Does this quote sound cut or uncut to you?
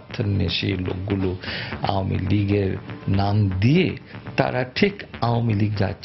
uncut